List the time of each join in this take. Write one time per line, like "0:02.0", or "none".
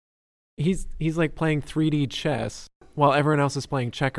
0:02.8